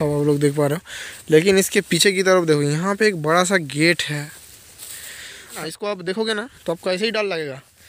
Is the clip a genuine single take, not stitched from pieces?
no; 1 cut; at 5.6 s

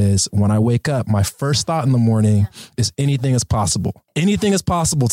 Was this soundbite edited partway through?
yes; 1 cut; at 4.2 s

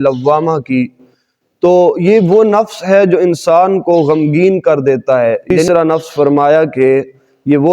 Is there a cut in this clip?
yes; 1 cut; at 5.5 s

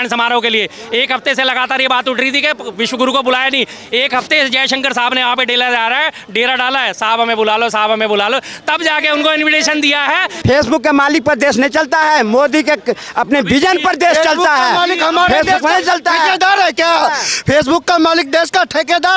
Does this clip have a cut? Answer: yes; 1 cut; at 10.3 s

